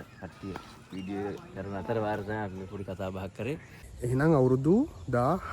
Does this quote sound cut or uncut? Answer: cut